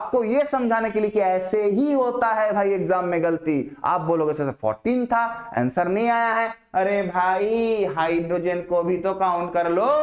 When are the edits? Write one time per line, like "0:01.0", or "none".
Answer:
none